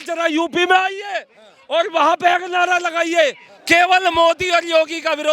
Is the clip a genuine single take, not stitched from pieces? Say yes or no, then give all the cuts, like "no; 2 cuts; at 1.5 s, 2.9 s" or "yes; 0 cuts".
no; 1 cut; at 3.5 s